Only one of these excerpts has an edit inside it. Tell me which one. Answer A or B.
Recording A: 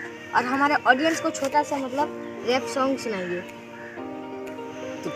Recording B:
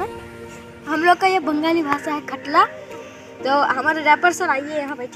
B